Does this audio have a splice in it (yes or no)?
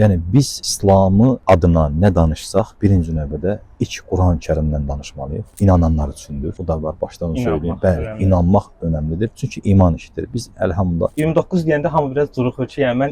yes